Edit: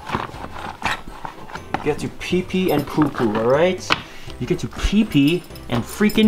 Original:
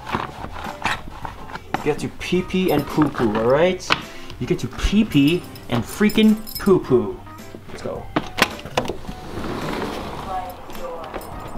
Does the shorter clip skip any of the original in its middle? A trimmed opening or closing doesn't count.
no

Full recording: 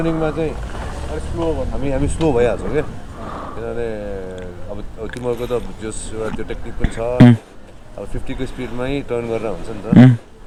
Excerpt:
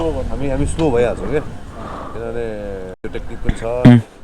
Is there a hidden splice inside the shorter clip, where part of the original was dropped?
yes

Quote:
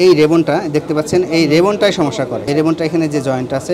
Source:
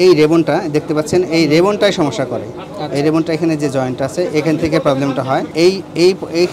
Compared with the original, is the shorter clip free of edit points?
no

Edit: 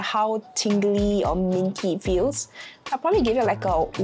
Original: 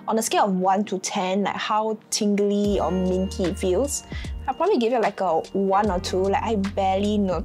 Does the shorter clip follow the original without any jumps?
yes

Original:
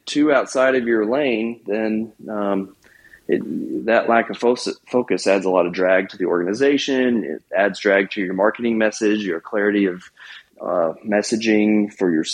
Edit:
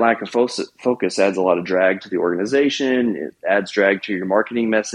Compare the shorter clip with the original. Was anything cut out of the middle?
no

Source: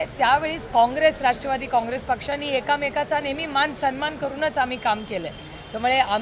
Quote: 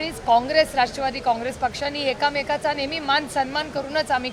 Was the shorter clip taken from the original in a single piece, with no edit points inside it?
yes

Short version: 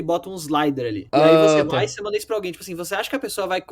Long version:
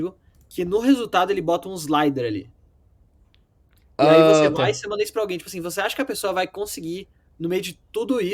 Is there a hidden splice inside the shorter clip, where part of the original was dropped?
yes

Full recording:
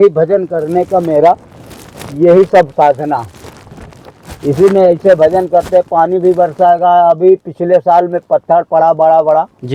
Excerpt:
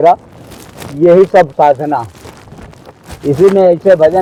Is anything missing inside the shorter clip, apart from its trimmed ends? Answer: no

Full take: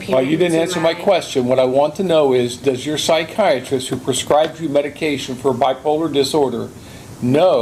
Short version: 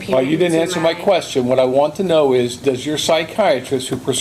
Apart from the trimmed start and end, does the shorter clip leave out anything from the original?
no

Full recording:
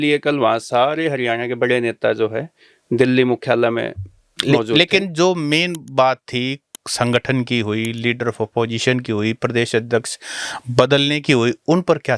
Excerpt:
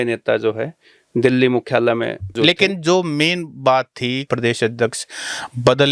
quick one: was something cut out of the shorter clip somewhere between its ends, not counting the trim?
yes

